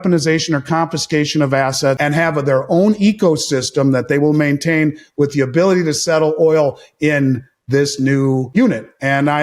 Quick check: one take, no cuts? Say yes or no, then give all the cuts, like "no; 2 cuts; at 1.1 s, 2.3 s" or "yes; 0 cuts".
no; 2 cuts; at 2.0 s, 8.5 s